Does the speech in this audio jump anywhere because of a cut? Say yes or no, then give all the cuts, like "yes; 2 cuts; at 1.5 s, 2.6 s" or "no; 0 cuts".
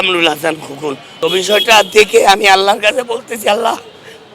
yes; 1 cut; at 1.0 s